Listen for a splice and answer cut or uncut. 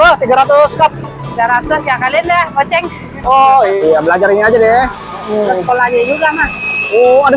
cut